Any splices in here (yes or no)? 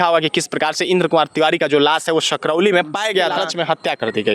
yes